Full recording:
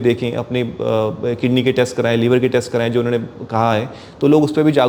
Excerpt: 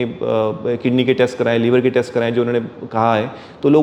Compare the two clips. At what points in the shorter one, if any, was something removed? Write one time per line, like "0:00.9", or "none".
none